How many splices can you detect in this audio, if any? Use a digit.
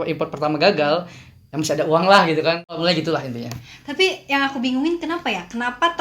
1